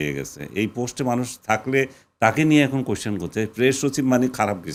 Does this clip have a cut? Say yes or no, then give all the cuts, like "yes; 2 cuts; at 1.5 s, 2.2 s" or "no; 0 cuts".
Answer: no; 0 cuts